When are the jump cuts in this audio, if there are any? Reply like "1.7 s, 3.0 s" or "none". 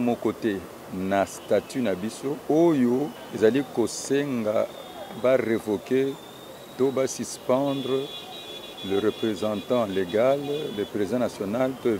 2.4 s, 3.2 s